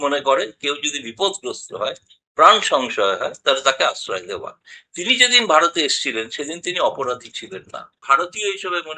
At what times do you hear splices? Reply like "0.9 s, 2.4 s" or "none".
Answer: 8.0 s